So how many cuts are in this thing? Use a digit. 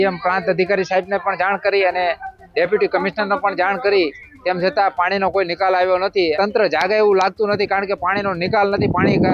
1